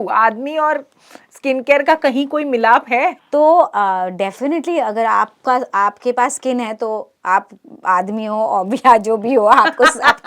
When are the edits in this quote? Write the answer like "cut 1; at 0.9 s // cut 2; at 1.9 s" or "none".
cut 1; at 3.2 s